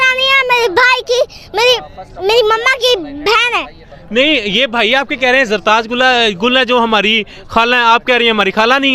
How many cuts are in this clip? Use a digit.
0